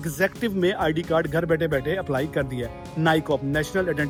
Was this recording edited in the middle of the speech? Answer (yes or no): no